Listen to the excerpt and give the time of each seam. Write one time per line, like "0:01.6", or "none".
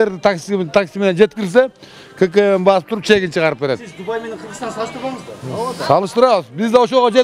none